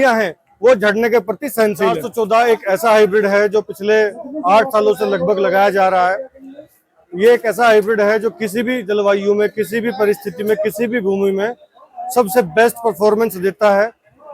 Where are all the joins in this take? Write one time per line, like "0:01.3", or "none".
0:02.0